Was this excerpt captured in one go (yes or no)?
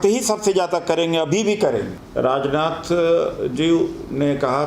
no